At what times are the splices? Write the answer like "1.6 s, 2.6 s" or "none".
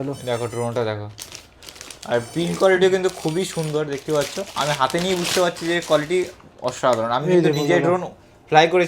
none

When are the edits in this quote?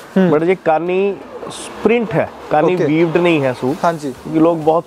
none

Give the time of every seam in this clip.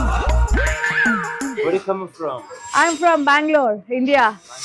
none

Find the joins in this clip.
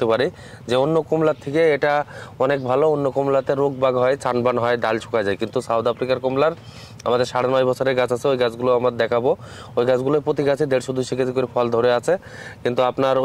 none

